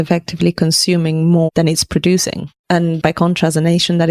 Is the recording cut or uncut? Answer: uncut